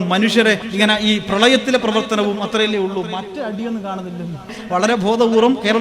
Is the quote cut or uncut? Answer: cut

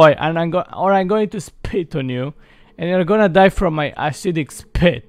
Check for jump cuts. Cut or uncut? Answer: uncut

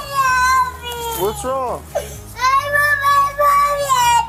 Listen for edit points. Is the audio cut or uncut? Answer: uncut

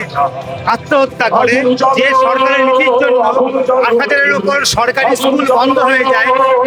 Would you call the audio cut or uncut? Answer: uncut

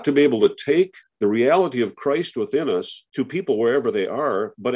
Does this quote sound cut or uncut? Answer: cut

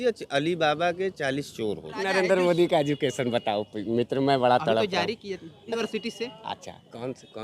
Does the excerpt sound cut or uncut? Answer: cut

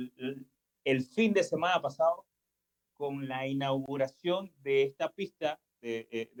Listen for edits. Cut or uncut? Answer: uncut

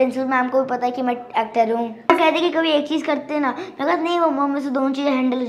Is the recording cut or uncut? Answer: cut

